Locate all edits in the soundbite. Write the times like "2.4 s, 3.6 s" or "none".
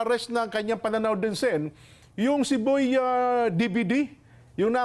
none